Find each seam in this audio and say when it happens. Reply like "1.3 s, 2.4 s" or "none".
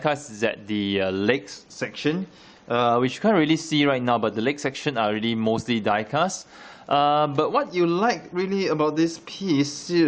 none